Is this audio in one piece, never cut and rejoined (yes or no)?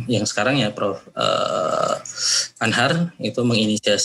yes